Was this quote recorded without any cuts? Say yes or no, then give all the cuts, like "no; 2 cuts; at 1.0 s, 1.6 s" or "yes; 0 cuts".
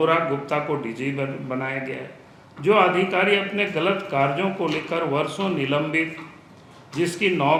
yes; 0 cuts